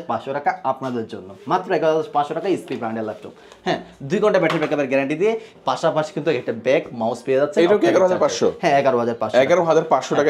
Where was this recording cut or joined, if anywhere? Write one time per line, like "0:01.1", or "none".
none